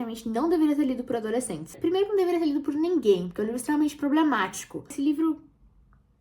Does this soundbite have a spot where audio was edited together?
yes; 1 cut; at 4.9 s

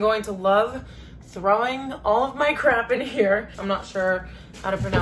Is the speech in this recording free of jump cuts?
no; 1 cut; at 3.5 s

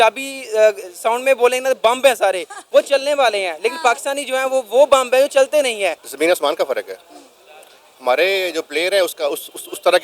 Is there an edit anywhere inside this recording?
yes; 1 cut; at 6.0 s

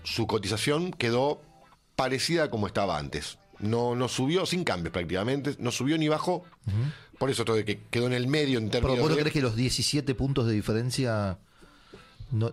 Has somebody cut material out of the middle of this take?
no; 0 cuts

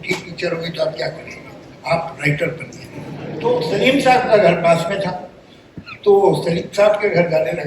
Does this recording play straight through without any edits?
no; 1 cut; at 3.2 s

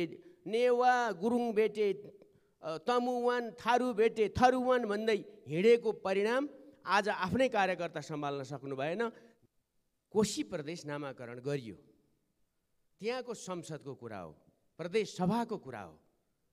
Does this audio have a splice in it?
yes; 1 cut; at 9.3 s

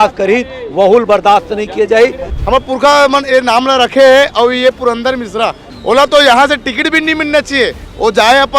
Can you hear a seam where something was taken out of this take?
yes; 2 cuts; at 2.3 s, 5.6 s

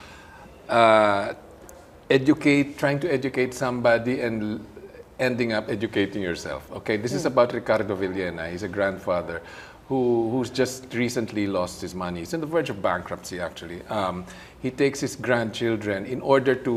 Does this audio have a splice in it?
no; 0 cuts

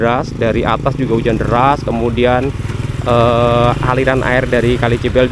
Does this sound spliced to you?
no; 0 cuts

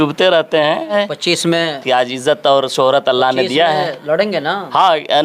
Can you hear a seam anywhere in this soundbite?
yes; 1 cut; at 0.9 s

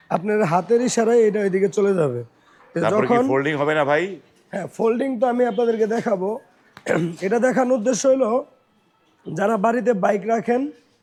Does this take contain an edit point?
no; 0 cuts

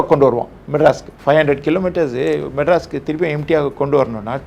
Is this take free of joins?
no; 1 cut; at 1.1 s

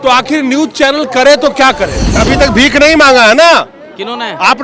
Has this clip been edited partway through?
yes; 1 cut; at 2.2 s

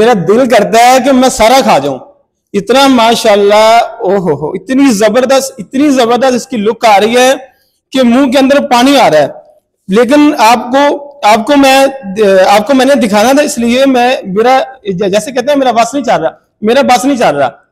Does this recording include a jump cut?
no; 0 cuts

